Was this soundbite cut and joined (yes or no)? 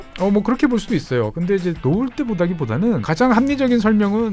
yes